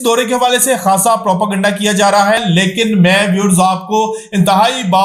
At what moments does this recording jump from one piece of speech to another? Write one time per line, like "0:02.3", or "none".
0:02.4

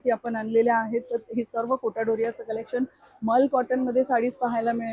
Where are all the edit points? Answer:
none

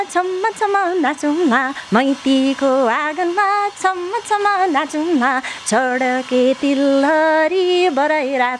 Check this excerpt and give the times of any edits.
none

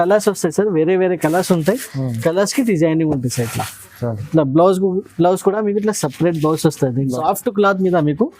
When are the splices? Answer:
0:07.0

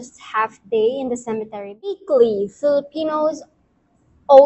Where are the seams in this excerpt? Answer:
0:01.9

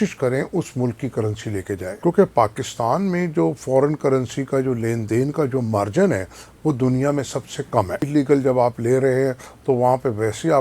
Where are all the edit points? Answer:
0:01.9
0:08.1

